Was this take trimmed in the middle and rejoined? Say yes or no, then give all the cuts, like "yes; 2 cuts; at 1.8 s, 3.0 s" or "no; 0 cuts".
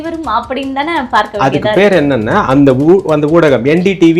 no; 0 cuts